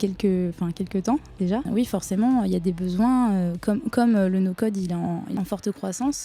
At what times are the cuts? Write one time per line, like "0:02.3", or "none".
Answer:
0:01.7
0:05.3